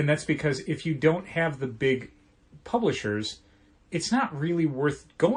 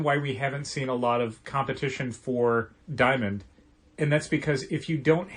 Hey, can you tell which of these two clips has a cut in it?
second; 1 cut; at 2.8 s

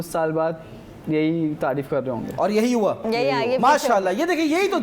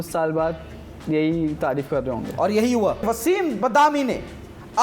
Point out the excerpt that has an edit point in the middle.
second; 1 cut; at 3.0 s

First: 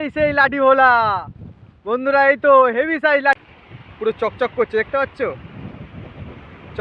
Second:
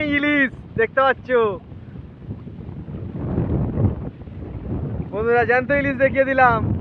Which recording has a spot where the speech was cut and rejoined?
first; 1 cut; at 3.4 s

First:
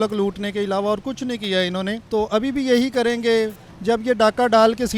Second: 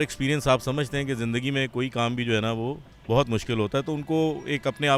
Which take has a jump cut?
first; 2 cuts; at 2.0 s, 3.6 s

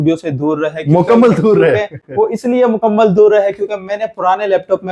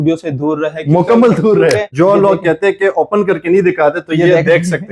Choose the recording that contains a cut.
second; 1 cut; at 1.9 s

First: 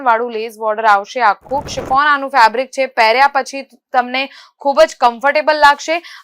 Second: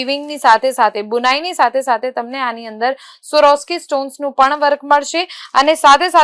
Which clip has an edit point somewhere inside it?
first; 1 cut; at 1.8 s

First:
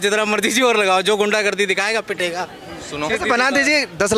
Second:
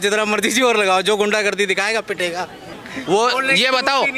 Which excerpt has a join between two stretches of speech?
second; 1 cut; at 2.8 s

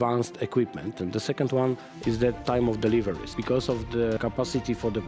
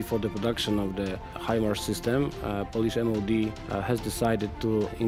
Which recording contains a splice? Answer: first; 2 cuts; at 1.0 s, 3.2 s

